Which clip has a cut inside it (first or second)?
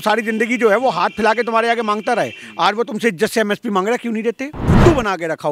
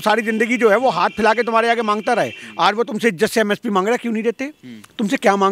first